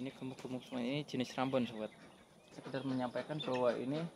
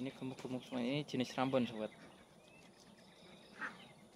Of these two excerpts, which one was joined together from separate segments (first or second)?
first